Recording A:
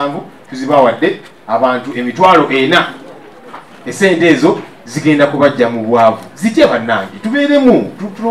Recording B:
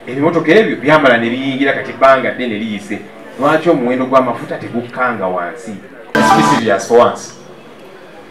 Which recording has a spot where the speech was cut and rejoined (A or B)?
B